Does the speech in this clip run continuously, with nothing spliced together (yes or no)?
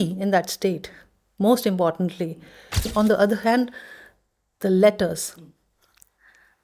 no